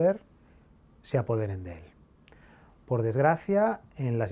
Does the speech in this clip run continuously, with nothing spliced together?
no; 1 cut; at 3.3 s

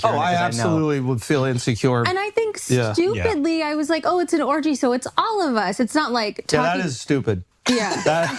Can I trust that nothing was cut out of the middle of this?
yes; 0 cuts

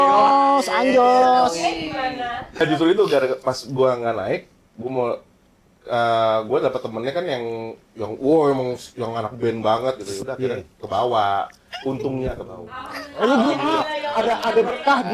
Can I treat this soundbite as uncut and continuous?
no; 1 cut; at 2.6 s

